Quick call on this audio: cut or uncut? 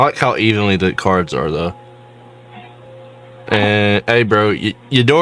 uncut